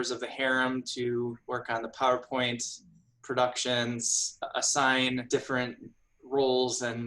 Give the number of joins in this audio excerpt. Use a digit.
2